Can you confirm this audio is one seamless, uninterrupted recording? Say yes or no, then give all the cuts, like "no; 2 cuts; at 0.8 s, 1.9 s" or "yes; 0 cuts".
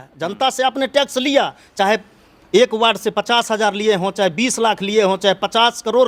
yes; 0 cuts